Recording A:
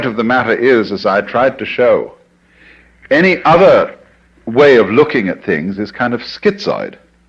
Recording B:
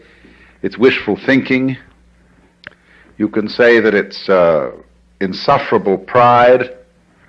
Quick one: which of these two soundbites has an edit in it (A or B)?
B